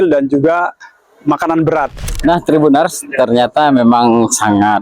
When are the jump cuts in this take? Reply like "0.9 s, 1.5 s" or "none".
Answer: 2.0 s